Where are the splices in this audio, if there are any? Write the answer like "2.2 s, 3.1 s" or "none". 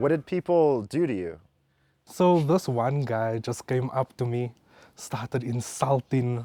none